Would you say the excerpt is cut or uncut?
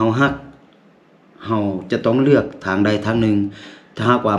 uncut